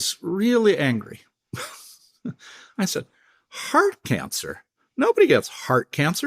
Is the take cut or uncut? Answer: uncut